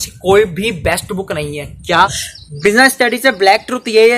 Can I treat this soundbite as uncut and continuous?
no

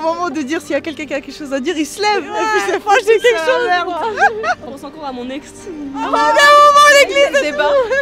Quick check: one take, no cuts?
no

